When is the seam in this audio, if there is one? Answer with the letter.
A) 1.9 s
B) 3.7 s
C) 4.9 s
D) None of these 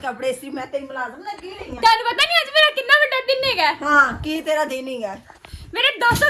D